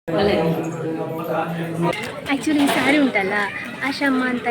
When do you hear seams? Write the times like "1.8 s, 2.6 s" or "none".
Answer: 1.9 s